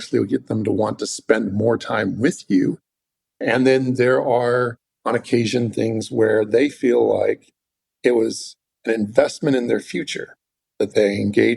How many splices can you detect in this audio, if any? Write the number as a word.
zero